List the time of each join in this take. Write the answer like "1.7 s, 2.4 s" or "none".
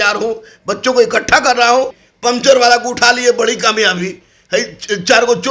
2.0 s